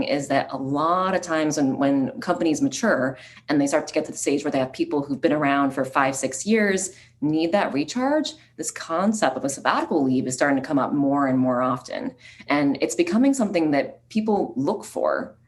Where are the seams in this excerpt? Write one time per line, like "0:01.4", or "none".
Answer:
0:02.2